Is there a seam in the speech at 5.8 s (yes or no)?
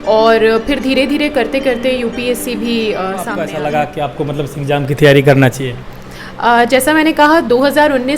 no